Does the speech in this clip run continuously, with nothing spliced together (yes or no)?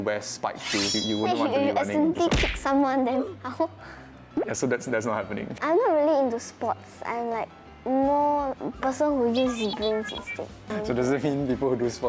no